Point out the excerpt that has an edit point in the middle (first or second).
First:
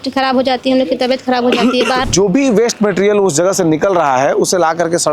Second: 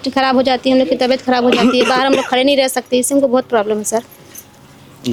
first